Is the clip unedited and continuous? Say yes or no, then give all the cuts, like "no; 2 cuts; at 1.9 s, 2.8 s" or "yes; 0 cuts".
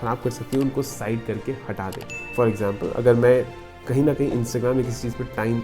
yes; 0 cuts